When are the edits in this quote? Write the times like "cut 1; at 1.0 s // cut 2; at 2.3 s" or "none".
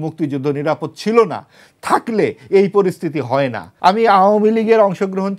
cut 1; at 3.6 s